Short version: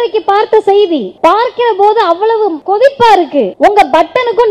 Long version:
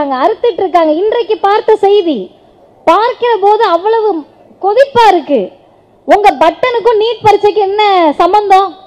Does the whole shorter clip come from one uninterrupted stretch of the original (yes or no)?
no